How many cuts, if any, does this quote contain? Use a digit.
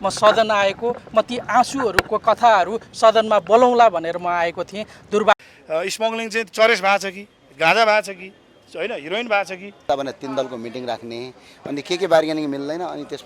2